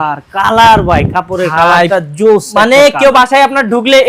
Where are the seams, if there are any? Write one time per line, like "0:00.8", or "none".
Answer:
none